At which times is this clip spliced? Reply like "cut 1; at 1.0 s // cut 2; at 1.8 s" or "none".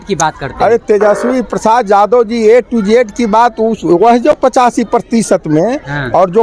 none